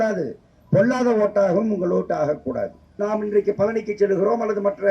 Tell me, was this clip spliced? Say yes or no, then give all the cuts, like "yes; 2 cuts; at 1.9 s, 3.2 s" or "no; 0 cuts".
yes; 1 cut; at 3.0 s